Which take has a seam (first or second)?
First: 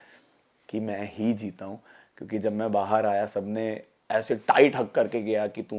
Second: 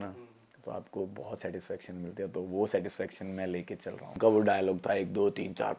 second